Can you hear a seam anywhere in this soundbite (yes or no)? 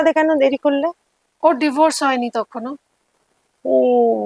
no